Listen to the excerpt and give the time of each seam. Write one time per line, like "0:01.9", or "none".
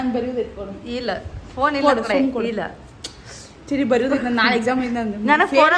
none